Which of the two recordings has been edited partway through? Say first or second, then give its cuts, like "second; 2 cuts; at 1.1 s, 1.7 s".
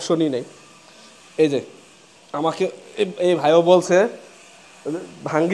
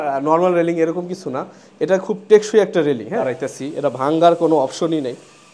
second; 1 cut; at 3.2 s